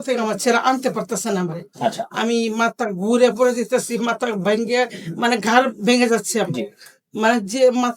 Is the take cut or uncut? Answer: uncut